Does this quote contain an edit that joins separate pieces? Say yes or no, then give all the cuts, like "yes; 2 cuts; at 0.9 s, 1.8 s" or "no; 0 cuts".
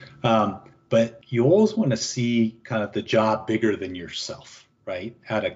yes; 1 cut; at 1.2 s